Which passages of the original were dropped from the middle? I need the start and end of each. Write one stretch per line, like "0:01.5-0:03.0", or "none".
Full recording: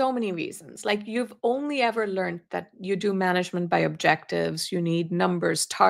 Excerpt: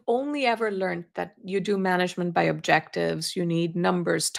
none